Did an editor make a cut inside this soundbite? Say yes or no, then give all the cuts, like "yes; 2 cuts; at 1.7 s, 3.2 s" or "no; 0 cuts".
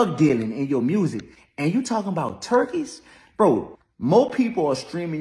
no; 0 cuts